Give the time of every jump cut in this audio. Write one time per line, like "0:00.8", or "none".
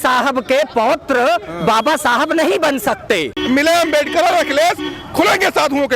0:03.4